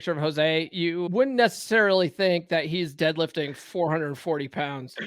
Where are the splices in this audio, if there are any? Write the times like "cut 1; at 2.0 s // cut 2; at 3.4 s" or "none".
cut 1; at 1.1 s